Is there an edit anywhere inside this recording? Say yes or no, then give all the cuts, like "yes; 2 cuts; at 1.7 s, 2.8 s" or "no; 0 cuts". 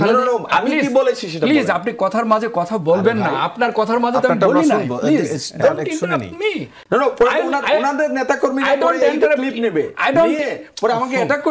no; 0 cuts